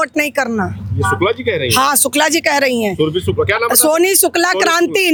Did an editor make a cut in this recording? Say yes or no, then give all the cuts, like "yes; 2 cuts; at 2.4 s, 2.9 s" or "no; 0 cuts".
no; 0 cuts